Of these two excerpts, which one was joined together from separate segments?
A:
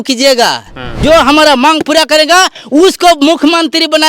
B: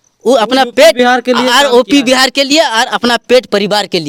A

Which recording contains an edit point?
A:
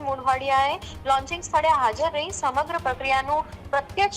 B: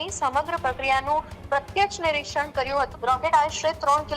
B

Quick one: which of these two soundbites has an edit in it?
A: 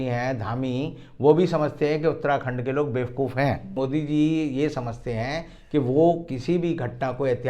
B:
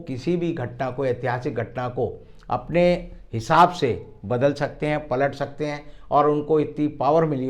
A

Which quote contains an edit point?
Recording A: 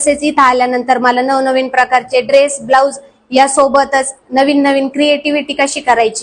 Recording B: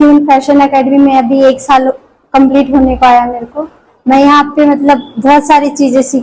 B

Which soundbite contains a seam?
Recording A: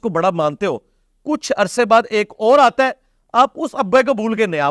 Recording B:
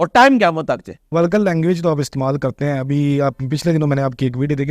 B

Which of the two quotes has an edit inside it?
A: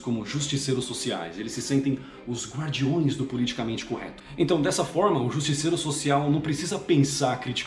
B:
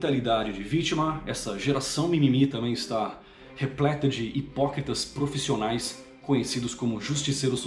A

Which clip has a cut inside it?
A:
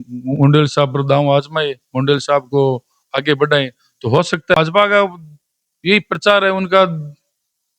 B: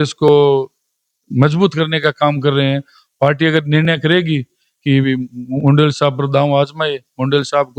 A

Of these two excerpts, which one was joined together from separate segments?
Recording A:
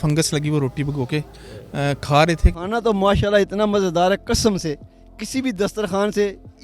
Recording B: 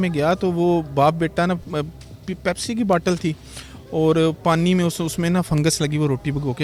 A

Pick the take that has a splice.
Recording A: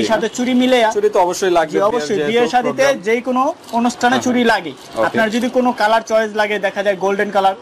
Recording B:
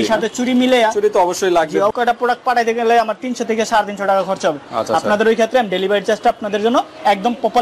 B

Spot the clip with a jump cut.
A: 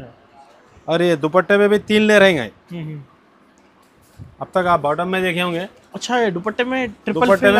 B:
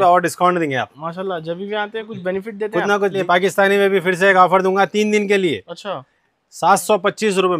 B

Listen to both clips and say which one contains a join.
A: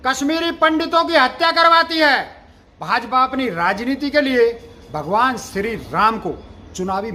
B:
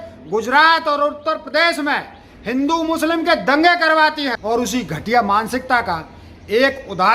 B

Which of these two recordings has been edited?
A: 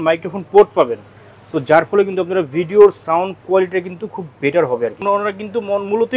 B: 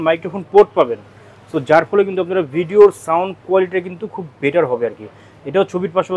A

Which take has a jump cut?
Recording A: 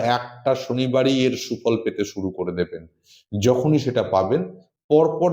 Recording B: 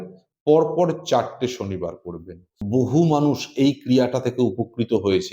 B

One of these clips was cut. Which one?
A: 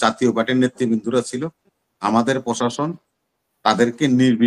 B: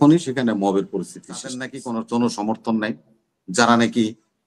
B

